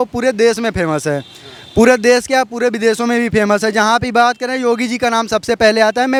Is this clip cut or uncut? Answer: uncut